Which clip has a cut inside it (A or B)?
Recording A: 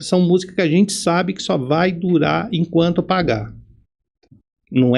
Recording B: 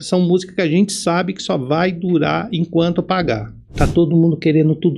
B